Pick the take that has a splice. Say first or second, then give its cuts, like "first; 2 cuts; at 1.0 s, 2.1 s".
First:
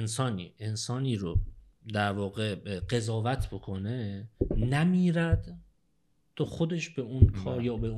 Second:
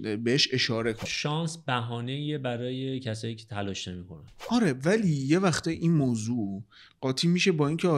second; 2 cuts; at 1.0 s, 4.3 s